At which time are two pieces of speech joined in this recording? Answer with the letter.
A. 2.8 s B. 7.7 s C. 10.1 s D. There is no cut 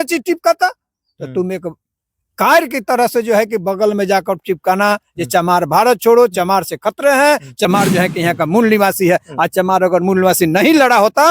B